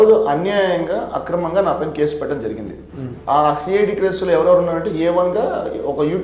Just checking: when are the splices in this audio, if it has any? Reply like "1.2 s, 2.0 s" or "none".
none